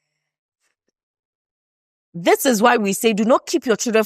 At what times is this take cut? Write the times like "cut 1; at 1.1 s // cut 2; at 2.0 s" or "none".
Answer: none